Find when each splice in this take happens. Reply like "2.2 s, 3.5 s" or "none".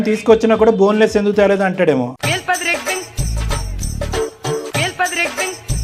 none